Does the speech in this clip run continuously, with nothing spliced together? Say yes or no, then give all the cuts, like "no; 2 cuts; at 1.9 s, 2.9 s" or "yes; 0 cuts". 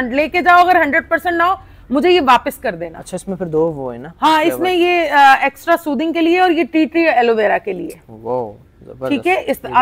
yes; 0 cuts